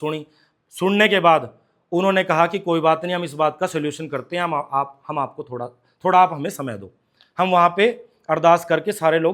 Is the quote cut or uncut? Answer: uncut